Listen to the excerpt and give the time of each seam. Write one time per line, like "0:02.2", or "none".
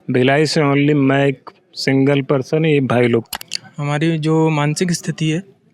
0:03.4